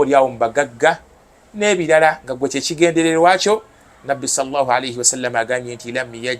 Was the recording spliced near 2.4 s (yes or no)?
no